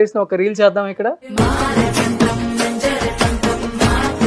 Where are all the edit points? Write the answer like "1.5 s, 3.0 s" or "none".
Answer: 1.2 s